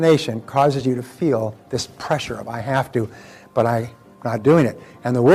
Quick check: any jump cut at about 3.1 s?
no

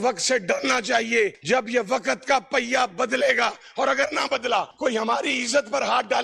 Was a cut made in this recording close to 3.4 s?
no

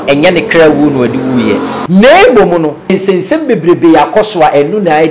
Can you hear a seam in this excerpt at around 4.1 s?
no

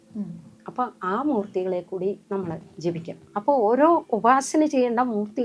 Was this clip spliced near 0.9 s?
no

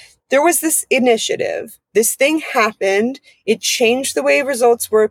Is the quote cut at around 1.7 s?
no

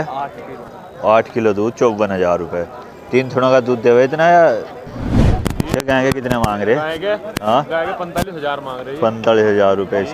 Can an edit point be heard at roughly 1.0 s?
no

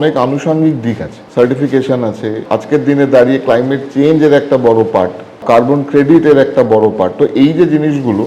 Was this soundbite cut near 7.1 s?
no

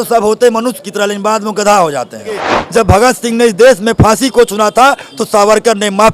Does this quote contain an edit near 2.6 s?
yes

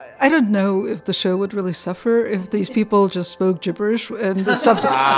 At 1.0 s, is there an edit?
yes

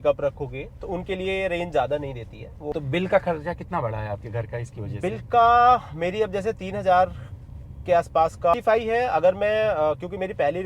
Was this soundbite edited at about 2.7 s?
yes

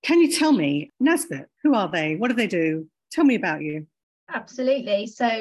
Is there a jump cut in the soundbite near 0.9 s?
yes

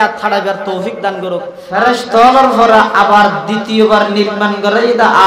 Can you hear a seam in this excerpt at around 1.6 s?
yes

